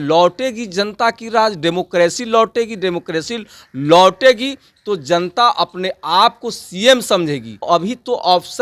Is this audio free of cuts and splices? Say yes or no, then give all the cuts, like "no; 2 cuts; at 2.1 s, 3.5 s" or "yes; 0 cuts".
no; 1 cut; at 7.7 s